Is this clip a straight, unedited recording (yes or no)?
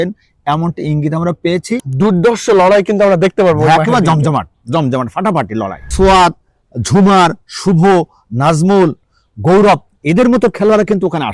no